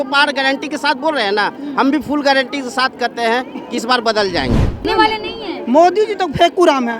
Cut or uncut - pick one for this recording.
cut